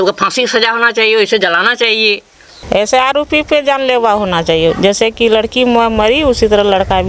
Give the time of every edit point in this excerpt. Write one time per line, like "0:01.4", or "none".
0:02.5